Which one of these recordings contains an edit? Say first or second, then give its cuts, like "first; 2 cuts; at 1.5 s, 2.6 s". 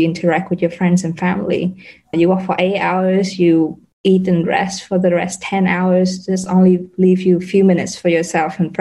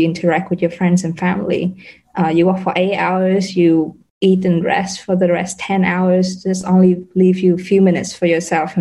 first; 1 cut; at 2.1 s